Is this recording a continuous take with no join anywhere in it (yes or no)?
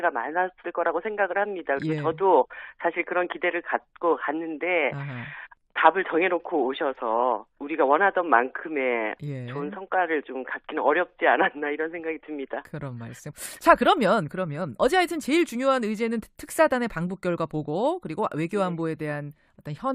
no